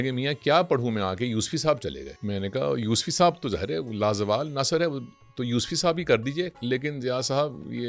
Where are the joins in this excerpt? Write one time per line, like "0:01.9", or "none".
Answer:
0:02.1
0:06.6

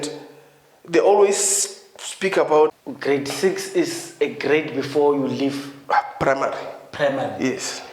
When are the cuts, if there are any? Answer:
0:02.7

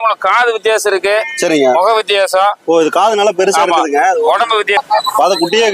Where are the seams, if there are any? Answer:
0:04.8

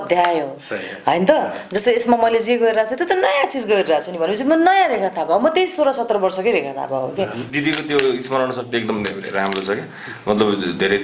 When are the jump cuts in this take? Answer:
0:07.4

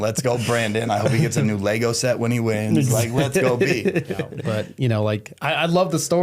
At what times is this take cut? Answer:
0:04.3

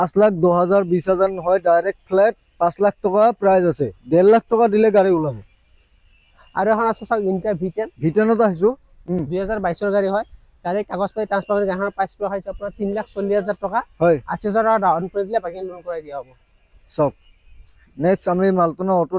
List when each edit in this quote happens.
none

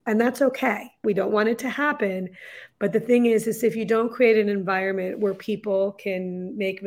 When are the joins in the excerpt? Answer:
0:01.0

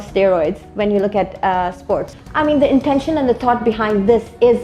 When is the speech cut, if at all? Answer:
0:02.1

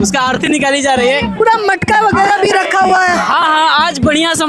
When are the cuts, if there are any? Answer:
none

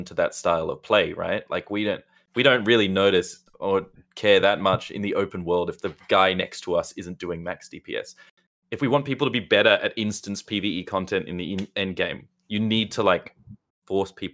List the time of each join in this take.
0:08.3

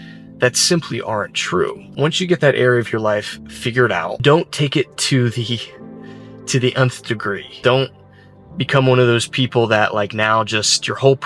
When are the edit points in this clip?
0:01.9
0:04.2
0:07.6

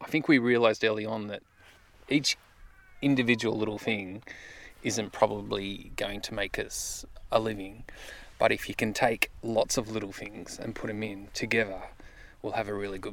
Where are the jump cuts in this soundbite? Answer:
none

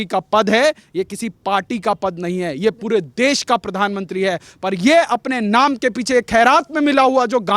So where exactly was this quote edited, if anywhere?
none

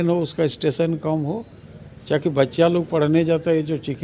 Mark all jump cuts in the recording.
none

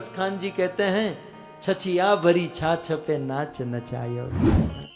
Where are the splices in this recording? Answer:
none

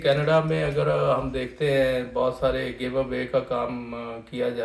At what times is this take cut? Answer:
none

